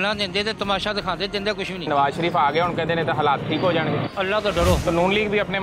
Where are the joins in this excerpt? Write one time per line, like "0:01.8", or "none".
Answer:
0:01.9
0:04.8